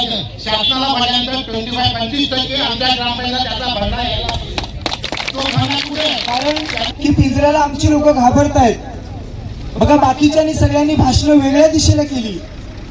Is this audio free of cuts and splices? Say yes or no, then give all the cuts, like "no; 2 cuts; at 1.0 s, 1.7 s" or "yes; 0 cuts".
no; 1 cut; at 6.4 s